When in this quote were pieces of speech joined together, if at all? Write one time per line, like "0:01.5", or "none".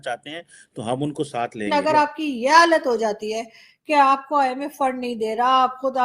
0:01.7